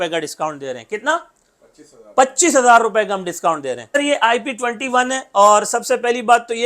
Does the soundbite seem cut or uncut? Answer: uncut